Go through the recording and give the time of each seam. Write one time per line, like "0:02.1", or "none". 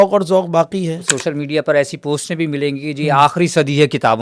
0:01.1